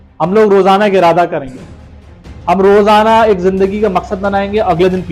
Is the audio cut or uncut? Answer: uncut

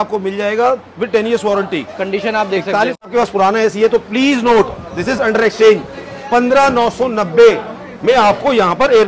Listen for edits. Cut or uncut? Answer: cut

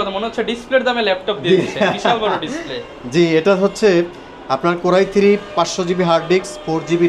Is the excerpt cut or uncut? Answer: uncut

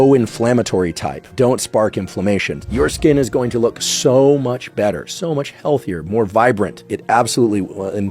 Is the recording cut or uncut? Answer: cut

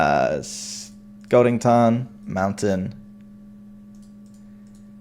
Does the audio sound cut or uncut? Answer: cut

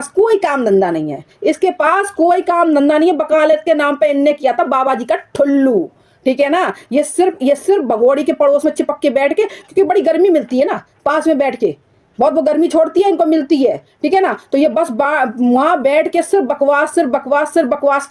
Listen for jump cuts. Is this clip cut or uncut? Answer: uncut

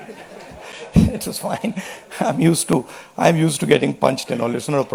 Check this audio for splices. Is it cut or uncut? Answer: uncut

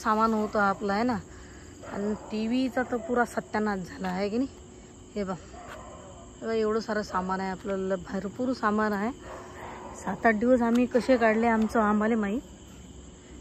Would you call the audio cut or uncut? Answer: uncut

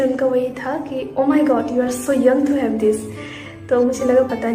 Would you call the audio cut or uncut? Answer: uncut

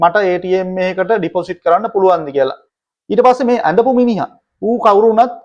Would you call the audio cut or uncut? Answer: cut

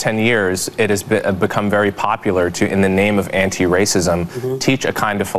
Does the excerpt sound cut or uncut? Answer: uncut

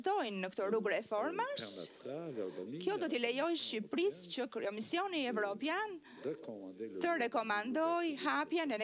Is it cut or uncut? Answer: uncut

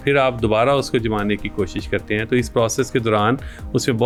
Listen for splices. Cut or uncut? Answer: uncut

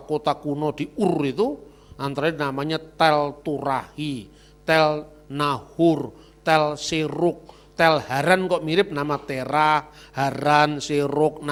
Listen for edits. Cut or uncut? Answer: uncut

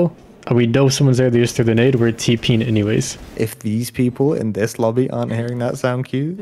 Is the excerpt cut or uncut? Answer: cut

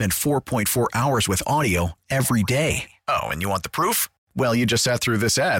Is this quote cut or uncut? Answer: uncut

